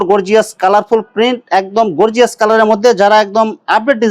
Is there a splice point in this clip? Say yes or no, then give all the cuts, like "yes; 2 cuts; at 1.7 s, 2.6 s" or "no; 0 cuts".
no; 0 cuts